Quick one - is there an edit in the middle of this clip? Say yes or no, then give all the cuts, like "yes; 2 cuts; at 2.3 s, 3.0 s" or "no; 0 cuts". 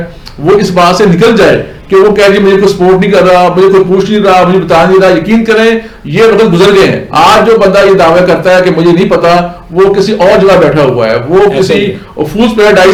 no; 0 cuts